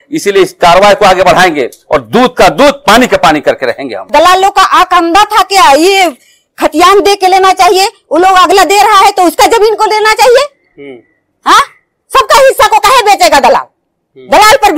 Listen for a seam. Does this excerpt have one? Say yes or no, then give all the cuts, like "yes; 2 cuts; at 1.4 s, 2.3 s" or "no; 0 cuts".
yes; 1 cut; at 4.1 s